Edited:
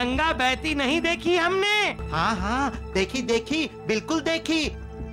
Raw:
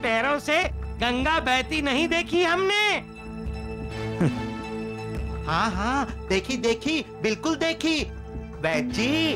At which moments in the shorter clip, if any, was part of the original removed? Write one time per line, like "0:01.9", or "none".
0:02.0